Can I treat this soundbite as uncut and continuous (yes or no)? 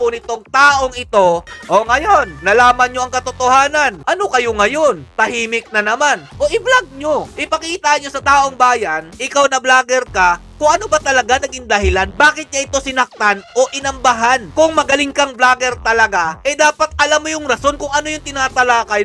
no